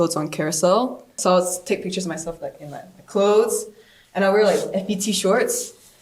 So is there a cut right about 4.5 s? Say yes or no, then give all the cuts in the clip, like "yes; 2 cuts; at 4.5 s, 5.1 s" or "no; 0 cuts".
no; 1 cut; at 1.2 s